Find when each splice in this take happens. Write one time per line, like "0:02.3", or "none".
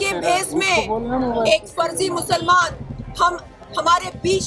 none